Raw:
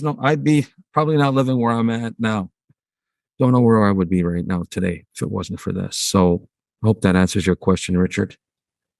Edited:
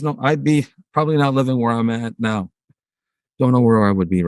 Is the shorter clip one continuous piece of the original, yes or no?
yes